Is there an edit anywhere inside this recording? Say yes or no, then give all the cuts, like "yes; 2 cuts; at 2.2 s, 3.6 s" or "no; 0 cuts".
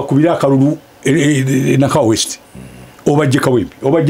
no; 0 cuts